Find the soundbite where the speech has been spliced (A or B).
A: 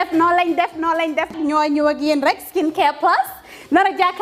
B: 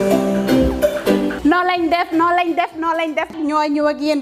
B